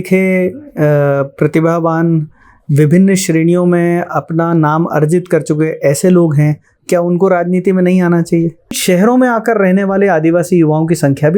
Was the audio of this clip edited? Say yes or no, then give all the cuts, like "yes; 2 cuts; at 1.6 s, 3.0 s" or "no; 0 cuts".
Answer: yes; 1 cut; at 8.8 s